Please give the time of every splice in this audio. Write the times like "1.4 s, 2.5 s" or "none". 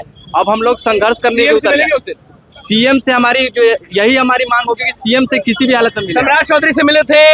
none